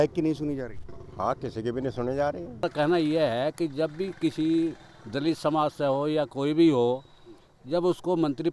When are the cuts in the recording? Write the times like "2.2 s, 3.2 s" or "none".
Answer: 2.6 s